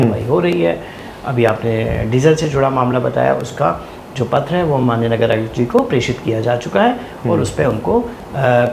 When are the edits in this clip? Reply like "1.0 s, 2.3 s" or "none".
none